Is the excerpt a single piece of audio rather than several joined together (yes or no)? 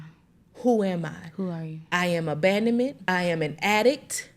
no